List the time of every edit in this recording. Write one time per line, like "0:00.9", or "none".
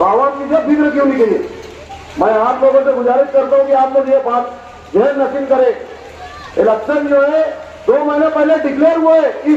none

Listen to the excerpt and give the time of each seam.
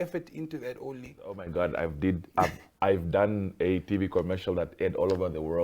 0:01.4

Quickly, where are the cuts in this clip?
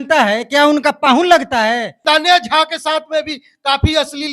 0:01.9

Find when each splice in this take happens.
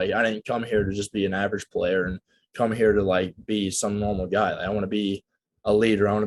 none

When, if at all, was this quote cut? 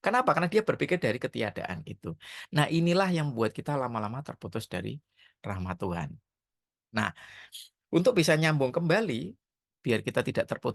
none

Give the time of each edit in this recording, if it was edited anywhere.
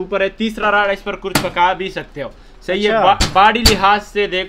none

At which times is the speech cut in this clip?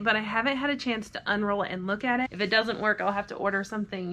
0:02.3

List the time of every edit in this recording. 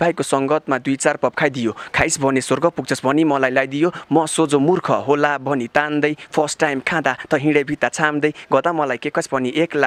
none

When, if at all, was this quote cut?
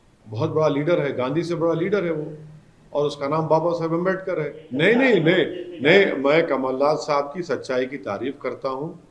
0:04.6

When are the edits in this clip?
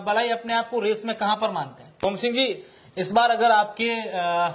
0:02.0

